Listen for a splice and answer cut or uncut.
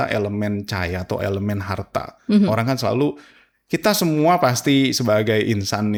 uncut